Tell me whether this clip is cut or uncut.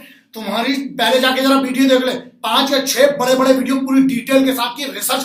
uncut